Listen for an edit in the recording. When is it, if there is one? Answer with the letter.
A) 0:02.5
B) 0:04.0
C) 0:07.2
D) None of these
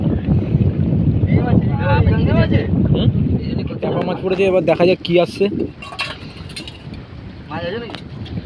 B